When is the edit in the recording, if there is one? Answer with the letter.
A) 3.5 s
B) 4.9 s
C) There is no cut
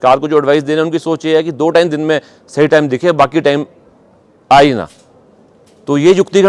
C